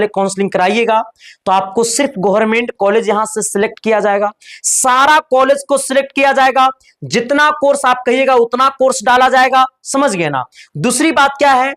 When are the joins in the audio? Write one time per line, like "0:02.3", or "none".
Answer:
none

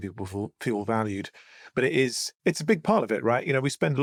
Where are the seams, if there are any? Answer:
none

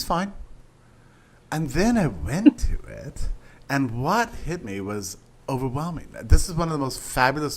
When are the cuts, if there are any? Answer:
0:06.4

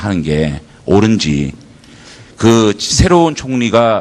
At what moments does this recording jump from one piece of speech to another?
0:02.6

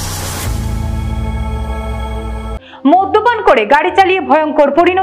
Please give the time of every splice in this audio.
0:02.6

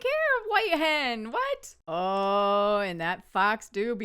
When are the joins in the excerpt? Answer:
0:01.7

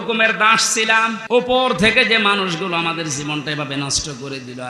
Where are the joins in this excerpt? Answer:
0:01.2

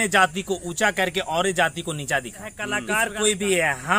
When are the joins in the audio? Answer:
0:02.7

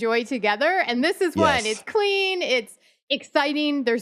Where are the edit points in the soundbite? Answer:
0:02.9

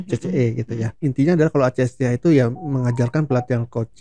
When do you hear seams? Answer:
0:00.9

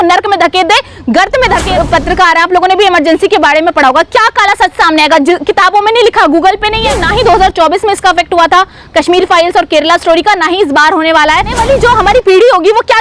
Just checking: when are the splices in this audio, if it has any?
0:01.6
0:07.0
0:11.6

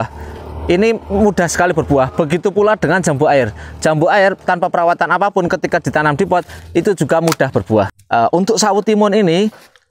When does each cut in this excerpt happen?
0:08.0

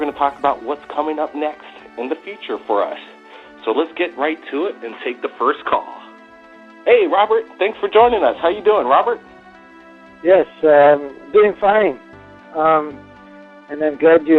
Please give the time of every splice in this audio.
0:06.0

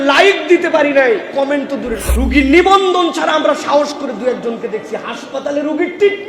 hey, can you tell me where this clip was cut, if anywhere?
0:02.0

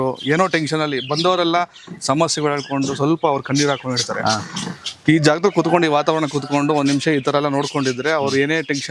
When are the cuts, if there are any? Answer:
none

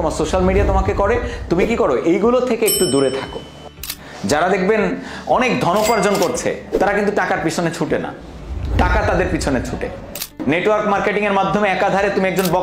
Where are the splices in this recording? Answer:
0:03.9
0:10.2

